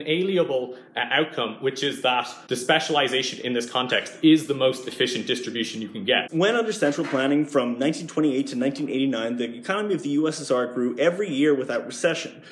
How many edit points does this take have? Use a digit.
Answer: 2